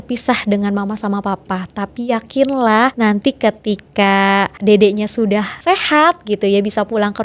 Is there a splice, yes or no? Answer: yes